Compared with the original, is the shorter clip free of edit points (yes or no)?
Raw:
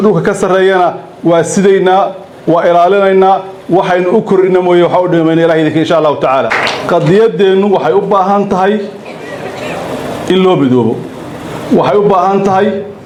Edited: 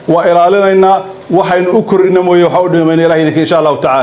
yes